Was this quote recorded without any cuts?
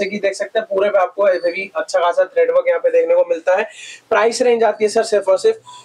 yes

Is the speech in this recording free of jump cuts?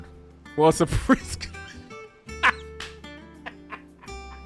yes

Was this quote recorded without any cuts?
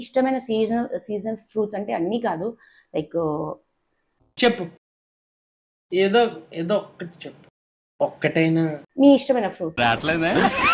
yes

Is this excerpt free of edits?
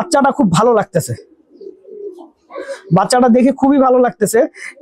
yes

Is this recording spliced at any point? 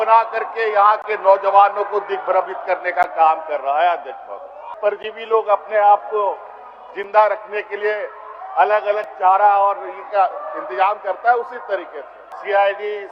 yes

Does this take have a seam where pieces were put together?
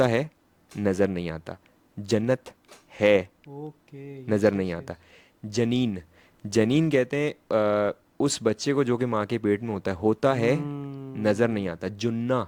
no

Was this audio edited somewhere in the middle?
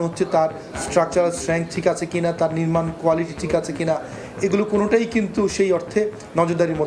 no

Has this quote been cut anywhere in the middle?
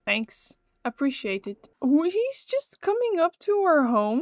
yes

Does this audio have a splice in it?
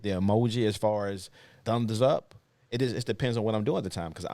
yes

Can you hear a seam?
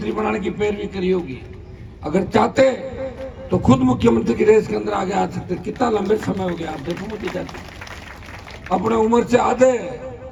no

